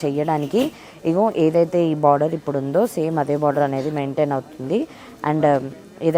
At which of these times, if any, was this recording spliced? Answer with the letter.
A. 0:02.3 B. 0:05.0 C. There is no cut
C